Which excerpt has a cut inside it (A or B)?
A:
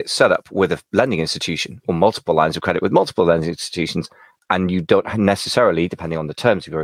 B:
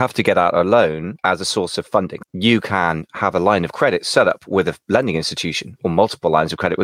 B